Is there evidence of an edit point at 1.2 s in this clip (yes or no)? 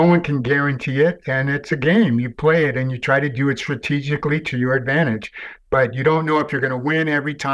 no